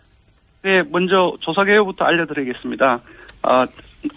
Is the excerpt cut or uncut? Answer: uncut